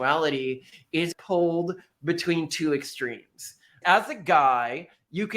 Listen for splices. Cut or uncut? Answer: cut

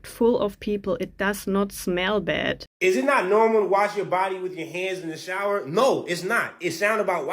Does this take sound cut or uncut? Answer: cut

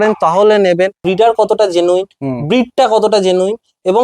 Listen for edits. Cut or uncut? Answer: cut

